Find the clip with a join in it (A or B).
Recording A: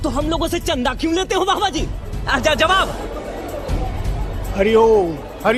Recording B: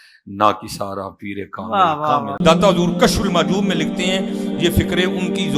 B